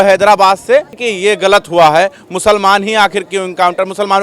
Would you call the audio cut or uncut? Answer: cut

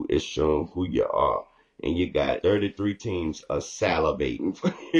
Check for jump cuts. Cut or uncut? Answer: cut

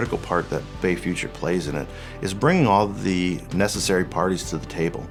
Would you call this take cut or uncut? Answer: uncut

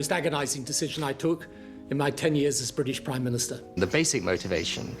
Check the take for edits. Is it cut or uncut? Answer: cut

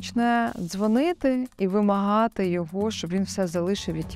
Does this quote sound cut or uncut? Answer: uncut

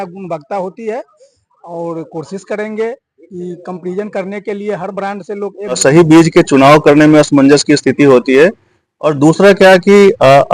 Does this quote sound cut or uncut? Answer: cut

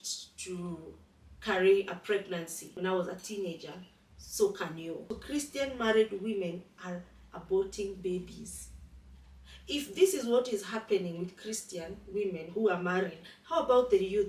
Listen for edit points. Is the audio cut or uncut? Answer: cut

